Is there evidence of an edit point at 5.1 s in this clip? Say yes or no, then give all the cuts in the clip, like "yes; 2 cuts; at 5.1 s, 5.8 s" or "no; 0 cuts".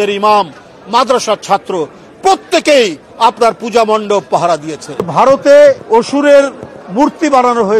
yes; 2 cuts; at 5.1 s, 5.8 s